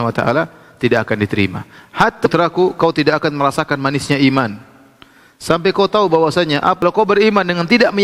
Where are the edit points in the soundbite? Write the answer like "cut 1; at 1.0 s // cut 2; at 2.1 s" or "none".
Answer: cut 1; at 2.3 s // cut 2; at 6.8 s